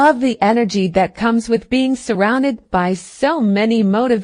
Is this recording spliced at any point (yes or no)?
no